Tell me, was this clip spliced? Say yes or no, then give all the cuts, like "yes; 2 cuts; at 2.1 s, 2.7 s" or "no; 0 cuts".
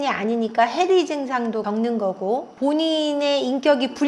yes; 1 cut; at 1.6 s